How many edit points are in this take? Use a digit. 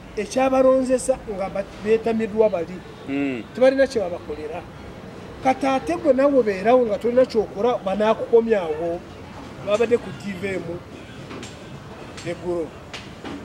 1